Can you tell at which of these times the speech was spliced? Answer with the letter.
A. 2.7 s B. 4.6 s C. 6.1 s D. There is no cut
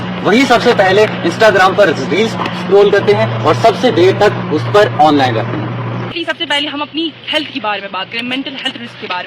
C